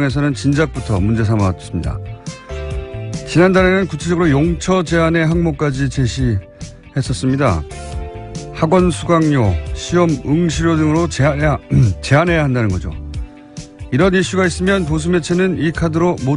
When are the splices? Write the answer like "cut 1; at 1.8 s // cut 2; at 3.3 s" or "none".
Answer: none